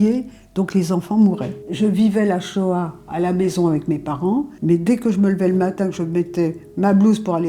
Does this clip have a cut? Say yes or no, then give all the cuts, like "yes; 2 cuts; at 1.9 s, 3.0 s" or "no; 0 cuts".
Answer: yes; 2 cuts; at 1.6 s, 4.5 s